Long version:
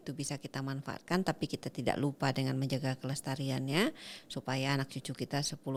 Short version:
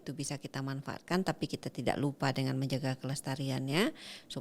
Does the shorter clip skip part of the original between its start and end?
no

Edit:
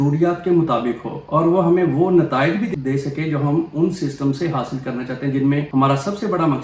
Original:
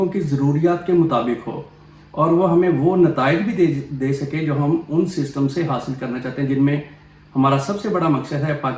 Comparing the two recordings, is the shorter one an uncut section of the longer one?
no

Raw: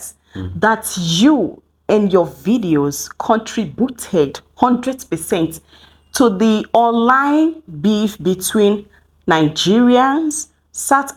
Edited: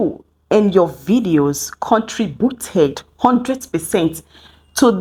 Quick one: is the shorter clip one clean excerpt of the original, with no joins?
yes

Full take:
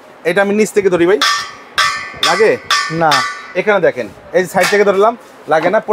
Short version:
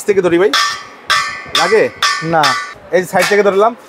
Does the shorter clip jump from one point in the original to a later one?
yes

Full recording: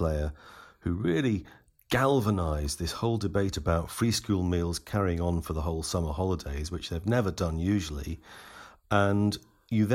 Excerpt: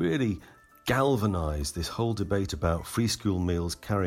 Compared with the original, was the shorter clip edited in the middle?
no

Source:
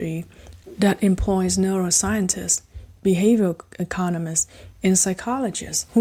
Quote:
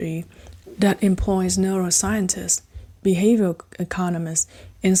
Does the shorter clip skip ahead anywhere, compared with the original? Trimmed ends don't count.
no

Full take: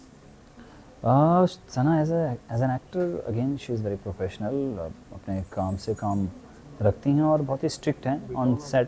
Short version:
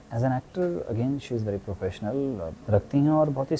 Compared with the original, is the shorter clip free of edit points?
no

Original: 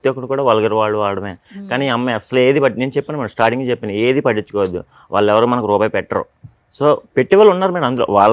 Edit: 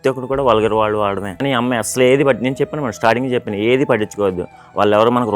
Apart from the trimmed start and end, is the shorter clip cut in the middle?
yes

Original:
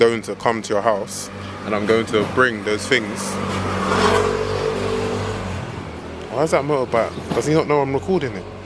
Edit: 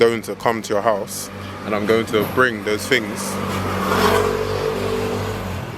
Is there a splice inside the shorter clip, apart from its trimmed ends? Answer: no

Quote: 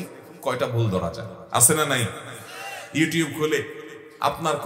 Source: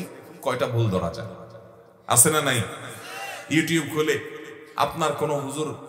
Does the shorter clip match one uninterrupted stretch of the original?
no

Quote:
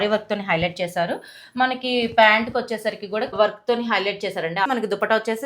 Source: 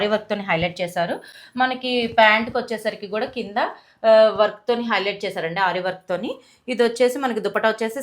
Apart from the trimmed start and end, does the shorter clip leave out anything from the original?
yes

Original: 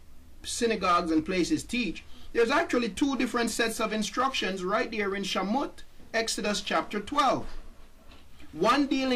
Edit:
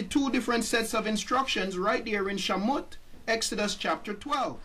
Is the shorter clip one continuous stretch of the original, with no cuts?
yes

